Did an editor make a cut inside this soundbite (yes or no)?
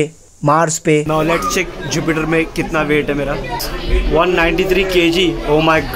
yes